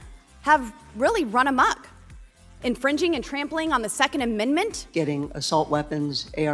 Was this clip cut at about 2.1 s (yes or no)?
no